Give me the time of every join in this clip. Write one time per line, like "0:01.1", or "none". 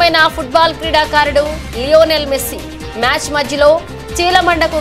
none